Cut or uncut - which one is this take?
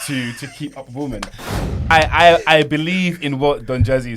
cut